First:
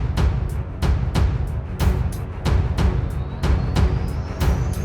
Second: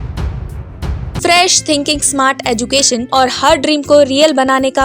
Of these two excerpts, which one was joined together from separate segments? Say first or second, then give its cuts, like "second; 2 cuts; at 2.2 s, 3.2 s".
second; 2 cuts; at 1.1 s, 3.0 s